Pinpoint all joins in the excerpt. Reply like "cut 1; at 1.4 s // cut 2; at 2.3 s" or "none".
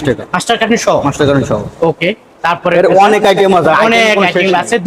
none